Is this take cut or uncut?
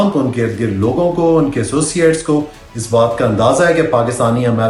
uncut